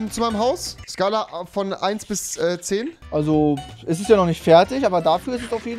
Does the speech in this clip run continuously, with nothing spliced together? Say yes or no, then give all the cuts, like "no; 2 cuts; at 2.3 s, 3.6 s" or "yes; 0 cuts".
yes; 0 cuts